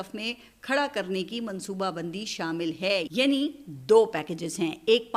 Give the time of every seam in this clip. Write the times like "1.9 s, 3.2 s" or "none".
none